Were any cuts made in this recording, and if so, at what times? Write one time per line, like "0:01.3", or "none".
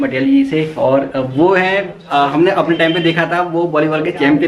none

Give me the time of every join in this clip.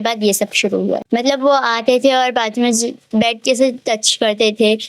0:01.0

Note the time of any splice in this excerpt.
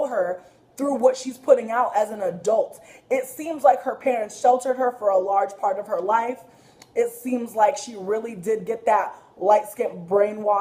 none

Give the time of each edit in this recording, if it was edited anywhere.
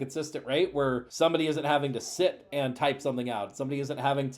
0:01.1

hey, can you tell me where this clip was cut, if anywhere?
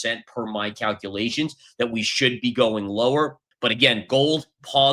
0:03.4

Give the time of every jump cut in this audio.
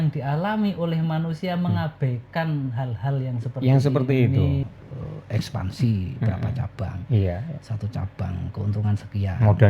0:04.6

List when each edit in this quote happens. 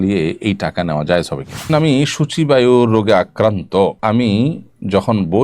0:01.7
0:04.0

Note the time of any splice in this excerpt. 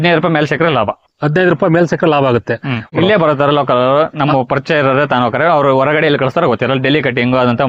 0:02.9

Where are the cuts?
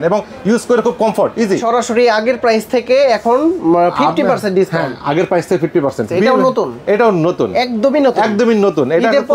0:01.6
0:06.1

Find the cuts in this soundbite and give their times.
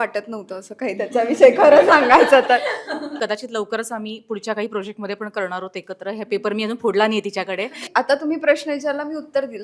0:03.1
0:07.8

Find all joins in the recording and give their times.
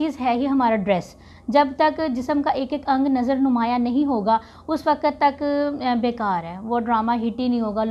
none

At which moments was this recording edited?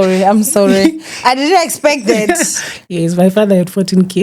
none

